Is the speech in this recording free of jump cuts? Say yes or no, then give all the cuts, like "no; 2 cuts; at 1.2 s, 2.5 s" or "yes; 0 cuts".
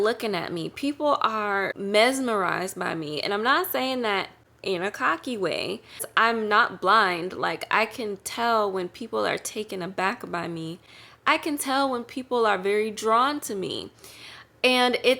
no; 2 cuts; at 1.8 s, 6.1 s